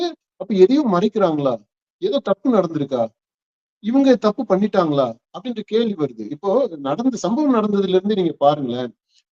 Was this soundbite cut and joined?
no; 0 cuts

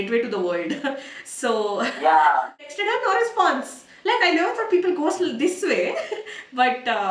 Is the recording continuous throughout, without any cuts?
no; 1 cut; at 2.7 s

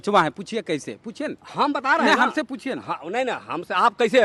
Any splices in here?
no; 0 cuts

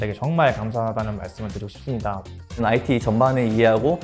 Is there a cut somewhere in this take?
yes; 1 cut; at 2.6 s

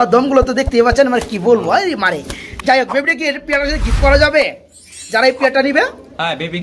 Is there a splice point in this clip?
no; 0 cuts

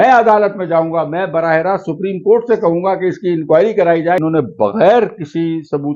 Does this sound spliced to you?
yes; 1 cut; at 4.2 s

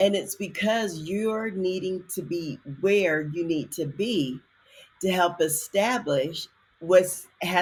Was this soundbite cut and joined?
no; 0 cuts

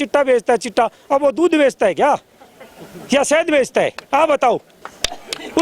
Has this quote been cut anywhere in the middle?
no; 0 cuts

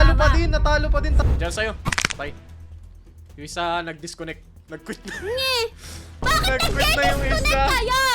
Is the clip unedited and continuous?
no; 1 cut; at 1.2 s

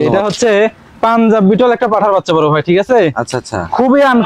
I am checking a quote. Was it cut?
no; 0 cuts

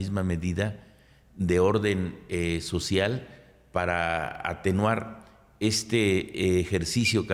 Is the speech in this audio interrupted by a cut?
no; 0 cuts

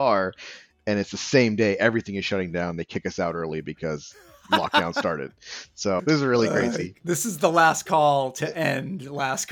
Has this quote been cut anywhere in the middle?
yes; 1 cut; at 6.9 s

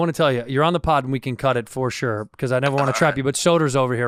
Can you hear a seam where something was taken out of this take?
no; 0 cuts

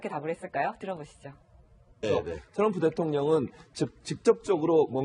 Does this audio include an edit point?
no; 0 cuts

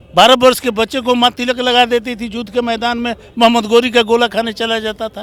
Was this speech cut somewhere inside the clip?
no; 0 cuts

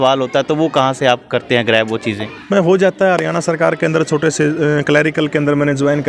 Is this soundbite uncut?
yes; 0 cuts

